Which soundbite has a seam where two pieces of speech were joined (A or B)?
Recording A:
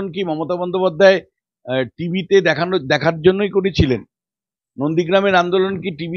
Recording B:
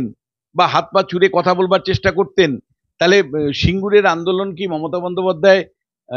B